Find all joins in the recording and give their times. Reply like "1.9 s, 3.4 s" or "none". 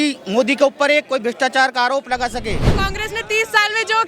2.8 s

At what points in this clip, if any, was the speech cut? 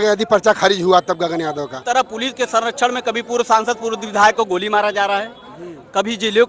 1.8 s

